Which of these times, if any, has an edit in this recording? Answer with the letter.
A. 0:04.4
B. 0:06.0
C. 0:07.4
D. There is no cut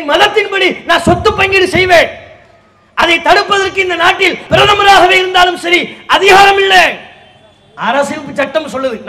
A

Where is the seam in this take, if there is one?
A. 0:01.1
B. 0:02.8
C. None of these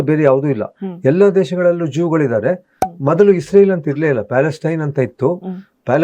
B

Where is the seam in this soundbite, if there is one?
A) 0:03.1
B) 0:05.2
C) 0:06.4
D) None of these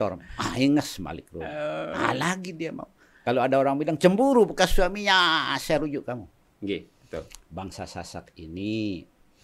C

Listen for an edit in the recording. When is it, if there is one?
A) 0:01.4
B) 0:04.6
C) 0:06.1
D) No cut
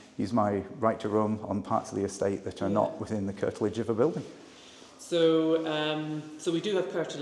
D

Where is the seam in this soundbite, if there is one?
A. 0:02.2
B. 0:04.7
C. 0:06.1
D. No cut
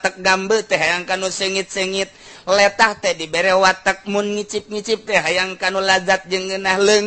D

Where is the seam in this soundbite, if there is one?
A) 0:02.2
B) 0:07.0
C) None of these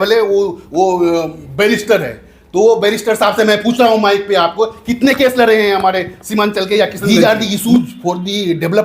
B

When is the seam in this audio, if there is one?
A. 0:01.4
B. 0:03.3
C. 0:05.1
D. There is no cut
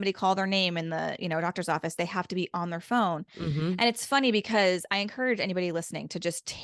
D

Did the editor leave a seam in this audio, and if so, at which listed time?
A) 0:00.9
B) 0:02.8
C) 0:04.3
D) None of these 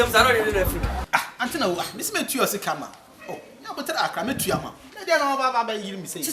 A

